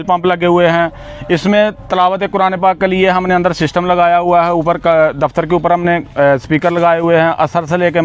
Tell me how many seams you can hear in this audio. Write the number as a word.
zero